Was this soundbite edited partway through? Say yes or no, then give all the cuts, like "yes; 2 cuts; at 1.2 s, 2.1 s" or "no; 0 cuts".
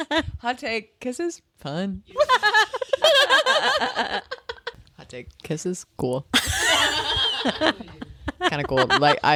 no; 0 cuts